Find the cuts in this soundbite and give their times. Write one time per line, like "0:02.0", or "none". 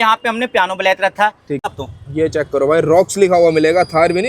0:01.6